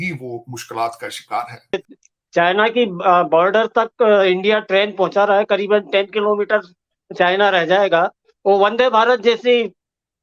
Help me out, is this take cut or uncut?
cut